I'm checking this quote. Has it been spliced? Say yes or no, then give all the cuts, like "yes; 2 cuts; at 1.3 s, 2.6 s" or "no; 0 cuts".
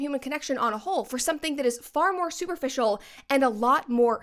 no; 0 cuts